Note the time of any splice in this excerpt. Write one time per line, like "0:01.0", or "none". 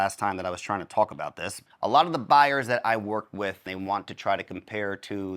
0:01.6
0:03.7